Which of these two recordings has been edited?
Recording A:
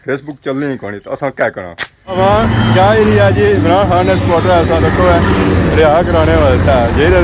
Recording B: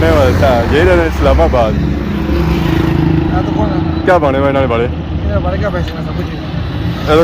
A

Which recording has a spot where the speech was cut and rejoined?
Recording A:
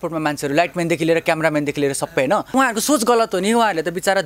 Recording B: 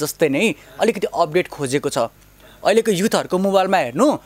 A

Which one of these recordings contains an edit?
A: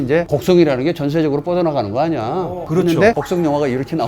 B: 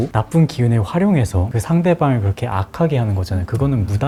A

